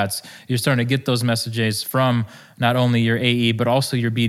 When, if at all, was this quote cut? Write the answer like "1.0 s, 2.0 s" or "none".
none